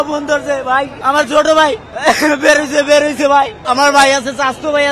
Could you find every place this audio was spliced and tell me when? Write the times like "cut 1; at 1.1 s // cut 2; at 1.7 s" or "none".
cut 1; at 0.9 s // cut 2; at 1.9 s // cut 3; at 3.6 s